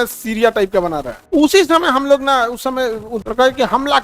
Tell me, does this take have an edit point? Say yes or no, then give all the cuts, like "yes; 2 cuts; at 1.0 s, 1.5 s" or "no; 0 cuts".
yes; 2 cuts; at 1.3 s, 3.2 s